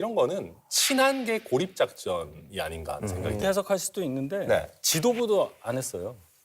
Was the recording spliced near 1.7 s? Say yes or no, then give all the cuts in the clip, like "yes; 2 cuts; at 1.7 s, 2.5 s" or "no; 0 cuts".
no; 1 cut; at 3.4 s